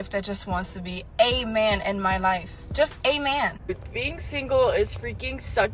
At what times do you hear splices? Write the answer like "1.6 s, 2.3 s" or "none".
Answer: 3.6 s